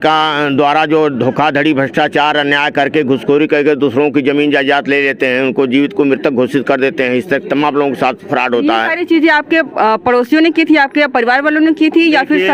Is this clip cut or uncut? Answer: uncut